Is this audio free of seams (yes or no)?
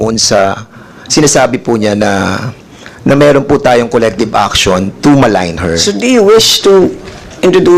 yes